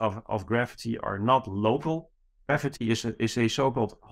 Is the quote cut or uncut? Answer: cut